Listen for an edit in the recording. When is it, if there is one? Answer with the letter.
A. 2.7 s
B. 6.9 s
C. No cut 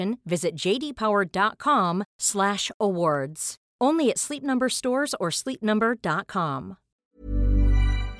B